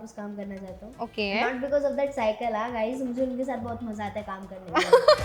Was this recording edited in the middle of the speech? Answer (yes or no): no